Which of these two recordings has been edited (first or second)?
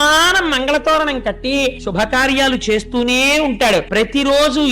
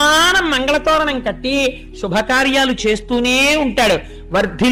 first